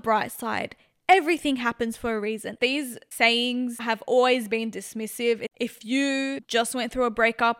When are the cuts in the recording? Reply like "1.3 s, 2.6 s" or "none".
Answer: 2.5 s, 5.5 s, 6.4 s